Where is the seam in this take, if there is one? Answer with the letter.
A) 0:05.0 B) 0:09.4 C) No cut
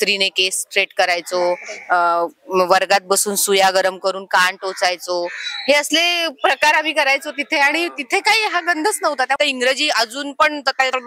B